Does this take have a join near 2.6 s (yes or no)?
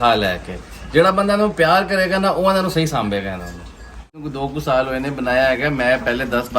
no